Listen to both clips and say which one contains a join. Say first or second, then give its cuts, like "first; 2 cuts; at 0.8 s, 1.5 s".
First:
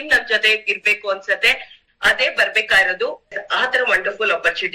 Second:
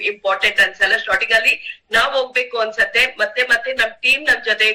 first; 1 cut; at 3.3 s